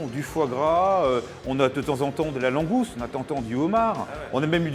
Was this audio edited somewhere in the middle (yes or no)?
no